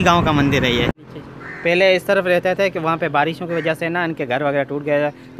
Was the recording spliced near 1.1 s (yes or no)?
yes